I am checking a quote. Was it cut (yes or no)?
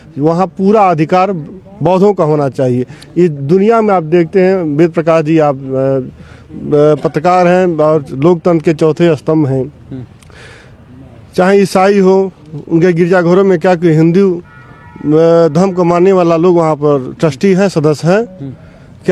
no